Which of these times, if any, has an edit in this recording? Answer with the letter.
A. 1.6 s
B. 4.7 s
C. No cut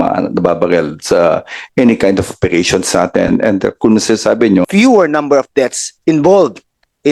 B